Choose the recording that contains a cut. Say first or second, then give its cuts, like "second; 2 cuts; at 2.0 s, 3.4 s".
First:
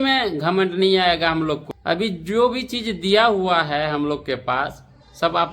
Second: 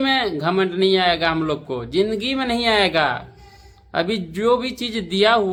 first; 1 cut; at 1.7 s